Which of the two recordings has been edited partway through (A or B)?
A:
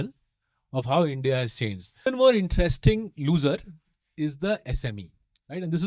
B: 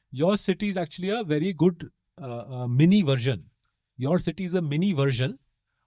A